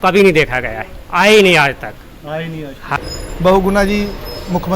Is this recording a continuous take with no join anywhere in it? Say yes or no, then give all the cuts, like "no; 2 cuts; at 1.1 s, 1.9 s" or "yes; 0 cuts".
no; 1 cut; at 3.0 s